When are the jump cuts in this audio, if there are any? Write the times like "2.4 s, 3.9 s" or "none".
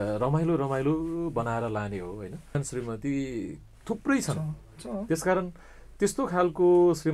2.5 s